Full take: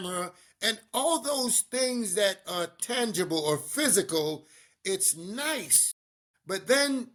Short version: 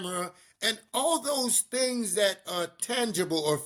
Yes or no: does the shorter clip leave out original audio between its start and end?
no